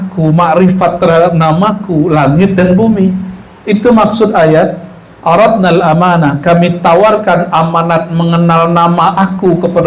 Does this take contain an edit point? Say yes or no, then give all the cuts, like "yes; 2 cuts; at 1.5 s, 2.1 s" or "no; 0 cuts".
no; 0 cuts